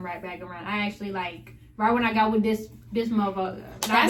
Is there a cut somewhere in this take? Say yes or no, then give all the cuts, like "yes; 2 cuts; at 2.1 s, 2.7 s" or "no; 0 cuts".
no; 0 cuts